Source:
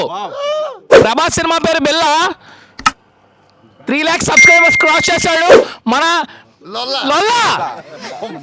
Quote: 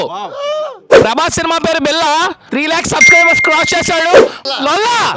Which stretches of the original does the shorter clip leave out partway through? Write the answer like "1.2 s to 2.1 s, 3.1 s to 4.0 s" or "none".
2.4 s to 3.8 s, 5.8 s to 6.8 s